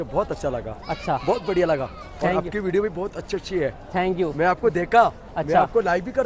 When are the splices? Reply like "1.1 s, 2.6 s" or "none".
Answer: none